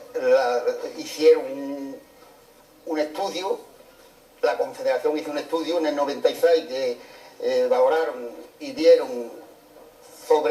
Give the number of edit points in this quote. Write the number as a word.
one